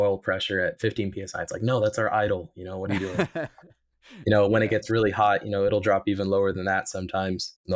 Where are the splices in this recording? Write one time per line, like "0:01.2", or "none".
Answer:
none